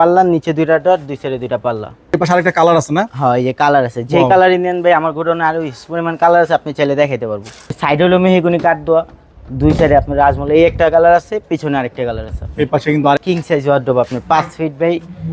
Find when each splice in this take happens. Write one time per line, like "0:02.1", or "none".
0:02.1
0:07.8
0:13.2